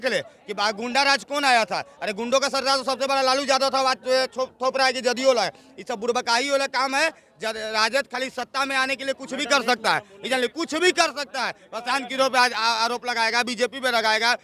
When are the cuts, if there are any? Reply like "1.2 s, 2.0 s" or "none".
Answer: none